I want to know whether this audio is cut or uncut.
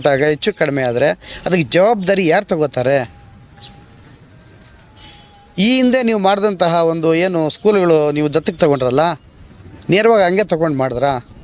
uncut